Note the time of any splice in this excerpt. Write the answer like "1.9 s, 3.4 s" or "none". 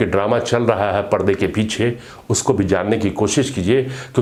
none